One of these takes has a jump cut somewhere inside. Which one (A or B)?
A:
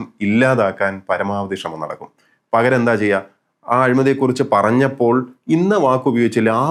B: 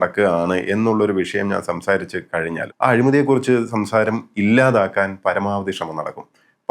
B